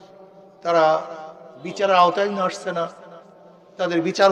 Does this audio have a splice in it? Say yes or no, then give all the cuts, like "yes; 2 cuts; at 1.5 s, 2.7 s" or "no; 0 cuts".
no; 0 cuts